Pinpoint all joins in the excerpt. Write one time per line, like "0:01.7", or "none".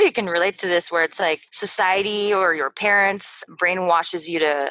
0:01.6
0:03.4